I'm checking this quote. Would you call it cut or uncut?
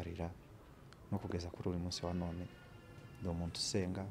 uncut